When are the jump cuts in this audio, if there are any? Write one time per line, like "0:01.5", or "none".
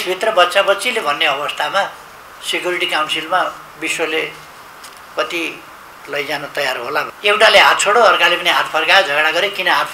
0:07.1